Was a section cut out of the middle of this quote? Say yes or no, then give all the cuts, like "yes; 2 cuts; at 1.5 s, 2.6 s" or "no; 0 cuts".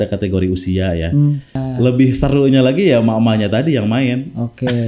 yes; 1 cut; at 1.6 s